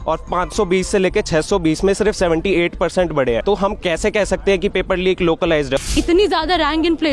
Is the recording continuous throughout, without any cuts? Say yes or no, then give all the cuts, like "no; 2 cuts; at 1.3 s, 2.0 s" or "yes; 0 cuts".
no; 2 cuts; at 3.4 s, 5.9 s